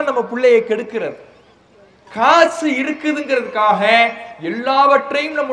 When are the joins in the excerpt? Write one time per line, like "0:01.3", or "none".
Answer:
none